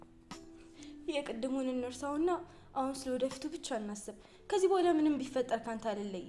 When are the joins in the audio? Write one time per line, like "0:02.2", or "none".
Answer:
0:01.1